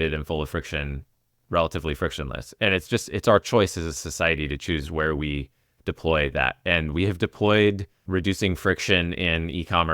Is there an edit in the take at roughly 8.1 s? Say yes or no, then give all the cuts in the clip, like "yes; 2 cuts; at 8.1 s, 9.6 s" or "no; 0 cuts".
yes; 1 cut; at 8.1 s